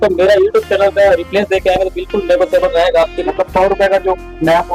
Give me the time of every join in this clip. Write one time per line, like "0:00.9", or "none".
0:03.3